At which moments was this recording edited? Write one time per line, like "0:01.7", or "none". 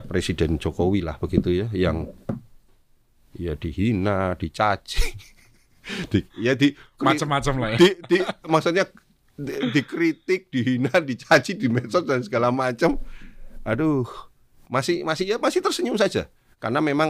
none